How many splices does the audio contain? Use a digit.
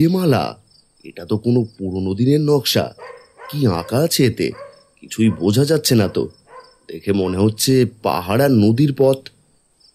0